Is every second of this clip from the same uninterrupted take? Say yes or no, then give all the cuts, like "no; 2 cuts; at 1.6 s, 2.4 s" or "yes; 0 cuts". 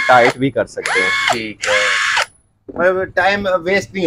yes; 0 cuts